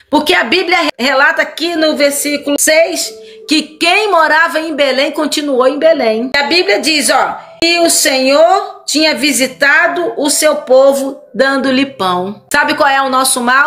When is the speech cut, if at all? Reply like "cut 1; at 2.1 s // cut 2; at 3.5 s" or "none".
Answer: cut 1; at 0.9 s // cut 2; at 2.6 s // cut 3; at 6.4 s // cut 4; at 7.6 s // cut 5; at 12.4 s